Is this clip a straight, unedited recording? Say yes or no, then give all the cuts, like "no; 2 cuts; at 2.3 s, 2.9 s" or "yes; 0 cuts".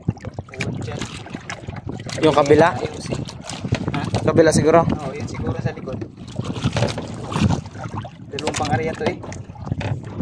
yes; 0 cuts